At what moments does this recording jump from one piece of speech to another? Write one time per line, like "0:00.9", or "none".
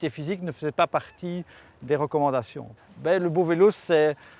0:02.9